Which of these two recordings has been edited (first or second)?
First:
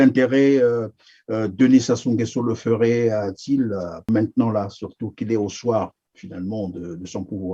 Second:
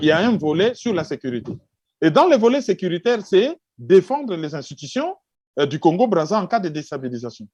first